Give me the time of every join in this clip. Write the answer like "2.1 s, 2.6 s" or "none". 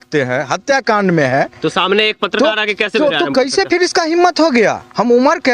none